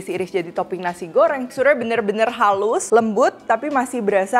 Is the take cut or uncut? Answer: cut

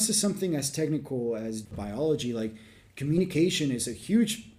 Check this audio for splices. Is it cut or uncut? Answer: cut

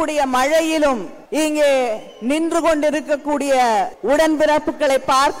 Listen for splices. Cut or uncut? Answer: cut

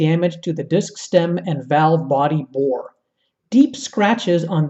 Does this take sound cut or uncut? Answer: uncut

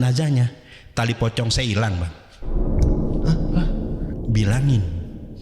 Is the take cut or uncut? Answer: cut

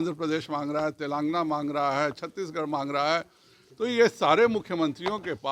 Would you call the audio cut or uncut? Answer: uncut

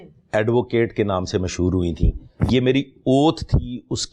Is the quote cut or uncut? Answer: cut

